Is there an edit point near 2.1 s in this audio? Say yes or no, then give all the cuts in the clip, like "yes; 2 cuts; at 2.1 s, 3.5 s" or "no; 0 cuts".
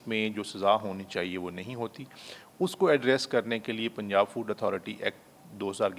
no; 0 cuts